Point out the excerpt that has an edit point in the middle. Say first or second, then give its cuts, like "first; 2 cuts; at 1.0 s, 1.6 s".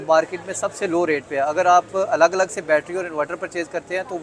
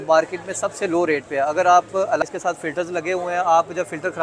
second; 1 cut; at 2.2 s